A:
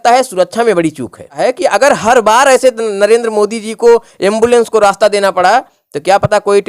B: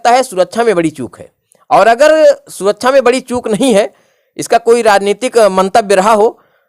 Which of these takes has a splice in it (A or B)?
A